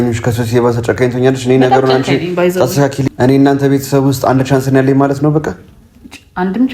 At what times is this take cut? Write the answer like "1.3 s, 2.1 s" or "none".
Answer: 3.0 s